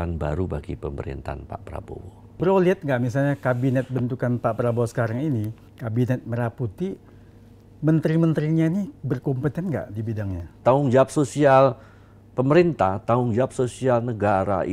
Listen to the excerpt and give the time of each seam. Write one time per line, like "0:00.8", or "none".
0:02.4
0:10.6